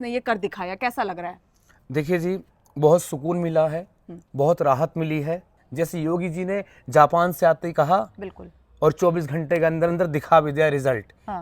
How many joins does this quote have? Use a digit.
1